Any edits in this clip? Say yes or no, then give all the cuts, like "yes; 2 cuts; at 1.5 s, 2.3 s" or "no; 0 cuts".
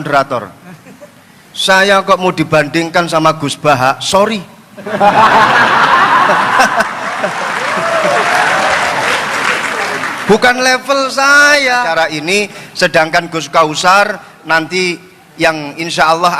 yes; 1 cut; at 11.9 s